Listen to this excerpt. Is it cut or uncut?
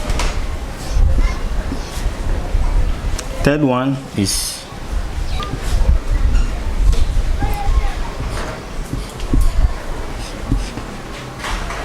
cut